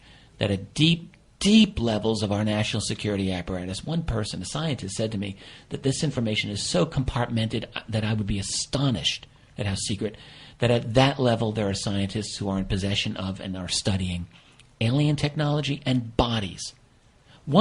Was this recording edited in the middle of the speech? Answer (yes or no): yes